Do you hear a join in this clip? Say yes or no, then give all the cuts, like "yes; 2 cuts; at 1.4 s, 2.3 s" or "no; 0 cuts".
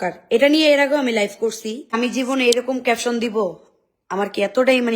yes; 1 cut; at 2.0 s